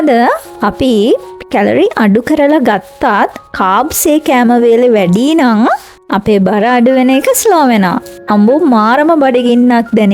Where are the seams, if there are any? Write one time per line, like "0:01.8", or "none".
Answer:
0:08.1